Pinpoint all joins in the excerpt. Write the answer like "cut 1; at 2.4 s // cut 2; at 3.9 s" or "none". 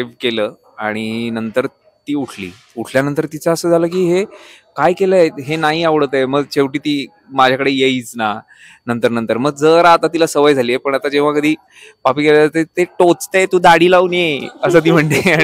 none